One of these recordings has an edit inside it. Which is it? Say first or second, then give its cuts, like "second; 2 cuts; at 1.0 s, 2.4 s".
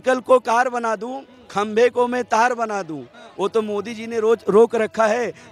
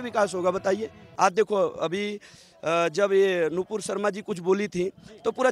second; 1 cut; at 1.0 s